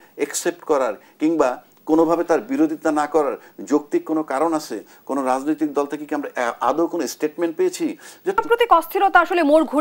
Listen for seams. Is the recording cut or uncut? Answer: cut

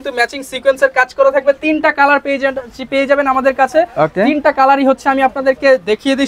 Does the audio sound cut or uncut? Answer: uncut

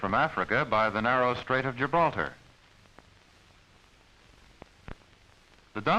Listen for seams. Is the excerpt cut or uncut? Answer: cut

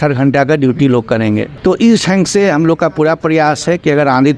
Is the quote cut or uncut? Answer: cut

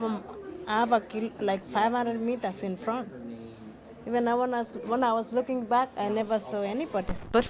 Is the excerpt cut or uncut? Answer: cut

